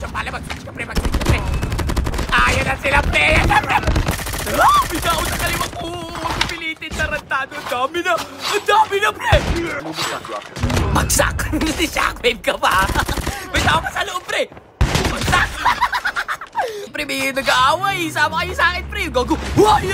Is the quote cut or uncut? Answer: cut